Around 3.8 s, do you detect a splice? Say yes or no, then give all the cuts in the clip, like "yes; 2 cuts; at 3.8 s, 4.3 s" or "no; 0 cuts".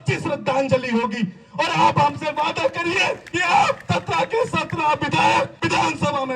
yes; 3 cuts; at 3.3 s, 3.8 s, 5.5 s